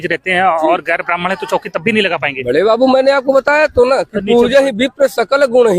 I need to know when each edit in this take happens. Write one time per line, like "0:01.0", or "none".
none